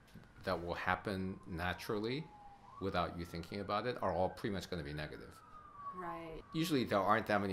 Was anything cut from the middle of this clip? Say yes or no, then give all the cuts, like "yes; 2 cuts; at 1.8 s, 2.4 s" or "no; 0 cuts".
yes; 1 cut; at 6.4 s